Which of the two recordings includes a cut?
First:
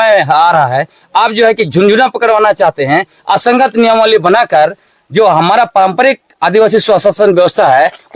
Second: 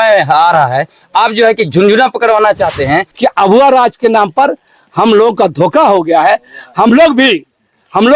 second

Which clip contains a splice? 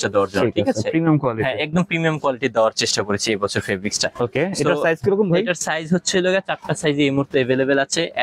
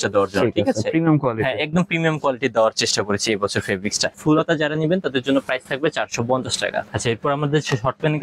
second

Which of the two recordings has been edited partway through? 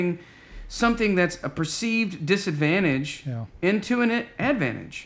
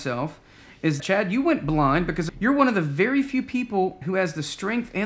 second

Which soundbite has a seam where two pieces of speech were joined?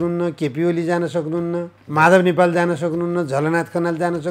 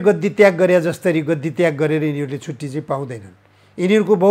first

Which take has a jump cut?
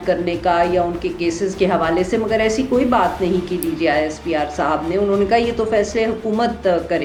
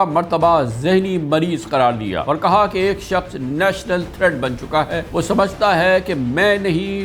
second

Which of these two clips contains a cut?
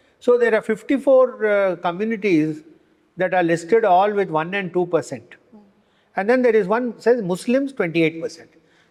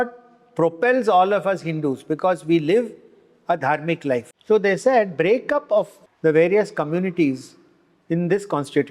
second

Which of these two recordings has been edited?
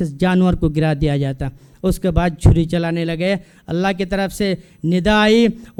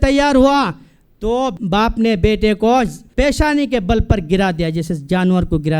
second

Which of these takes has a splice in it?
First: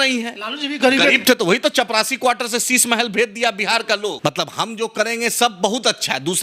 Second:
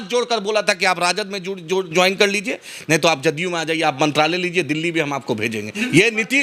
first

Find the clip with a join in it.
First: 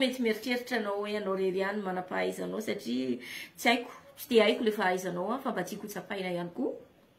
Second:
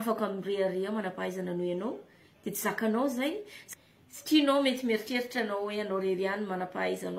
second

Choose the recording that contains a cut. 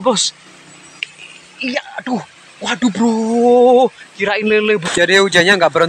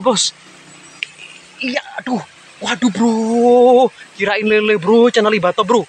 first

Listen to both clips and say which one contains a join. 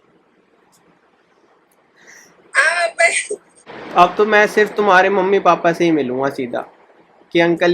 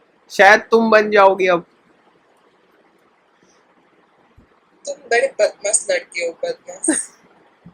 first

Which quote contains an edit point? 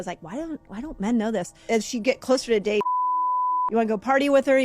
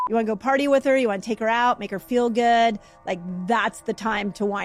first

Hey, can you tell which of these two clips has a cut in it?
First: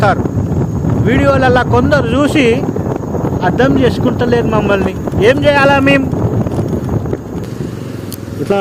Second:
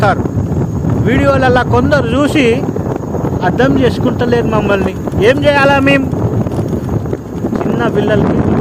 first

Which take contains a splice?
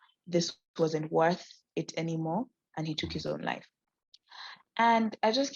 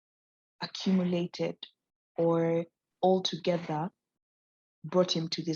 second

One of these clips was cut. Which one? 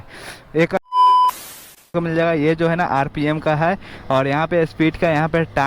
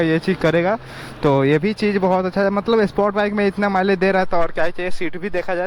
first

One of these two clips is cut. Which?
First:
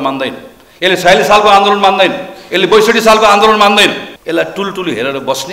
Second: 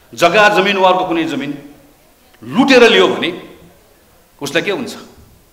first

